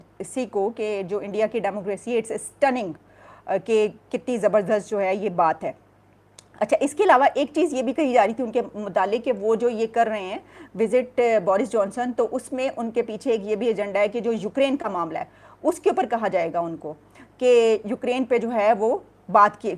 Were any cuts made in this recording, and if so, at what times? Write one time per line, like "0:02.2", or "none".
none